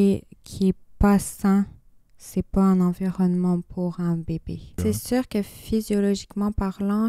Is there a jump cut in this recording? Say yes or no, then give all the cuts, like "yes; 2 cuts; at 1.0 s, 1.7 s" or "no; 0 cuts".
yes; 1 cut; at 4.7 s